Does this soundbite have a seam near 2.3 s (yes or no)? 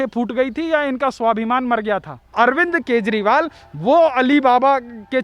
yes